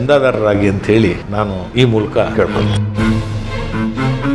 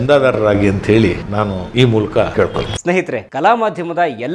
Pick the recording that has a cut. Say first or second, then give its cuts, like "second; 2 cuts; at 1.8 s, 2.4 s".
first; 1 cut; at 2.6 s